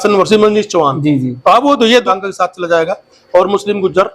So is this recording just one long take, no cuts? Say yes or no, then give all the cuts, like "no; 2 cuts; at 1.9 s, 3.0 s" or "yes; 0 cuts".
no; 1 cut; at 2.1 s